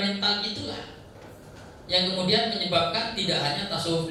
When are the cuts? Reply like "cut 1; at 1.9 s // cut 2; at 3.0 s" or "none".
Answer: none